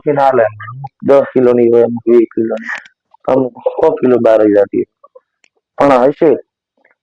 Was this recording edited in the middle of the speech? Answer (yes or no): no